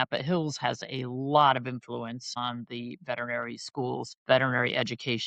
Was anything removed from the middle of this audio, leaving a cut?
yes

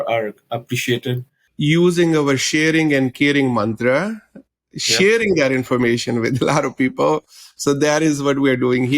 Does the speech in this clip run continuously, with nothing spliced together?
no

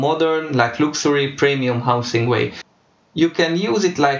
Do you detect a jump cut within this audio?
yes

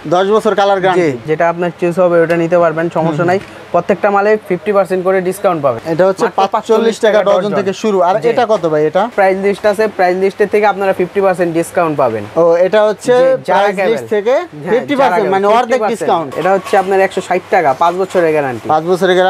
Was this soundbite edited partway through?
yes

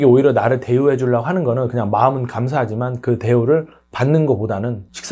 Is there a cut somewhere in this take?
no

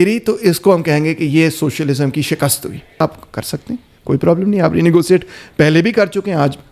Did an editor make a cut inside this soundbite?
yes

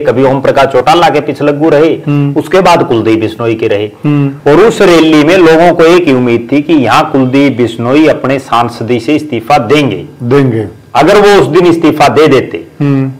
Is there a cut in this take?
yes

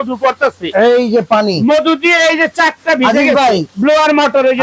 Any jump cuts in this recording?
yes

